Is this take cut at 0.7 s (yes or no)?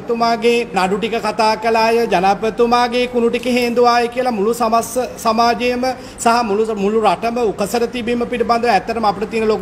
yes